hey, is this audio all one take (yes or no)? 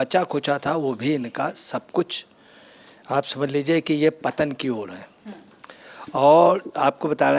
yes